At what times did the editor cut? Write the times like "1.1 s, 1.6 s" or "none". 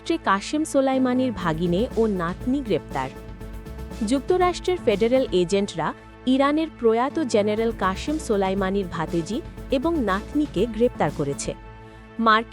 none